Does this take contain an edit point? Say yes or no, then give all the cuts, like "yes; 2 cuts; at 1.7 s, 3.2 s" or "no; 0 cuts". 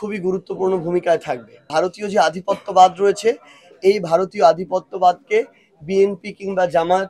yes; 1 cut; at 1.7 s